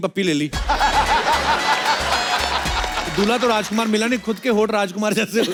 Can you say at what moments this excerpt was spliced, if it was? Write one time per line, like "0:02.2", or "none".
none